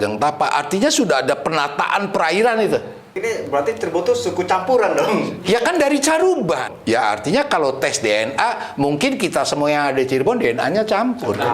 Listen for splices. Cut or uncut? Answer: cut